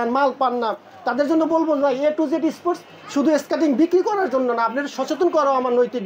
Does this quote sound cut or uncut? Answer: uncut